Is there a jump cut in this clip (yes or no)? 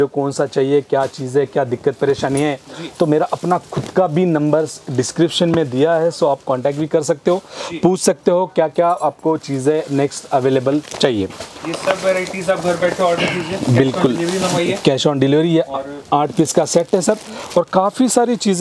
no